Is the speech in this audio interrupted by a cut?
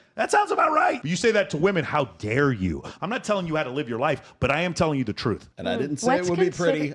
yes; 2 cuts; at 1.0 s, 2.9 s

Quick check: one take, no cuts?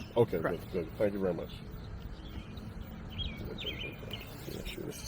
yes; 0 cuts

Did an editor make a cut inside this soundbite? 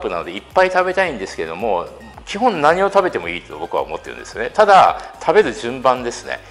no; 0 cuts

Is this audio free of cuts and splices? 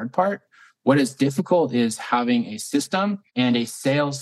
no; 1 cut; at 3.2 s

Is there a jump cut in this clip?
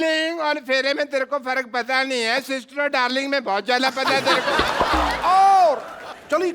yes; 1 cut; at 5.1 s

